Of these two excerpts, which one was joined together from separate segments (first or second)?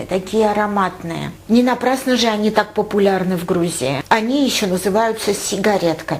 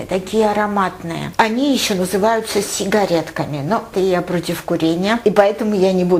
second